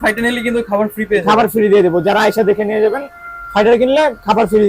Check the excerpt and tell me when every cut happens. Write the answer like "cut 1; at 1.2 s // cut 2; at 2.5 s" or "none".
none